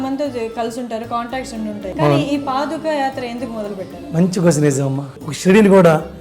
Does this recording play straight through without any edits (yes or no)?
no